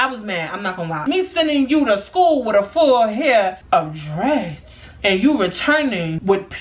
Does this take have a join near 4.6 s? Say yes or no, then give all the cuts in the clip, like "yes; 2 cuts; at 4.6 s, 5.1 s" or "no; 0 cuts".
no; 1 cut; at 1.0 s